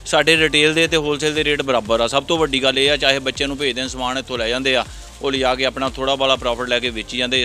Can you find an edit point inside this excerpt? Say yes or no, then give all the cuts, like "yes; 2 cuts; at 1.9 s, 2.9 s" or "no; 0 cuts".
no; 0 cuts